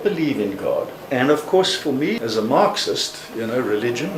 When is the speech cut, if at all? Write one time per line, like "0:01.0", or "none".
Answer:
0:01.0
0:02.1